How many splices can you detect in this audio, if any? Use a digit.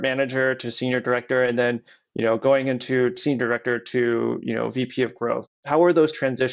1